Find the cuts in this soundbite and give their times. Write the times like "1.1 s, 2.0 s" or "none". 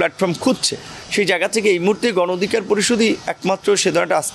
none